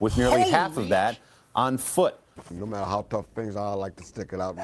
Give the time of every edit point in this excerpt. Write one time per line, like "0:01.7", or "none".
0:02.3